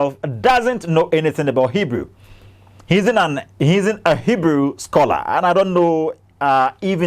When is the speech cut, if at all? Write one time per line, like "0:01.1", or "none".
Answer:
none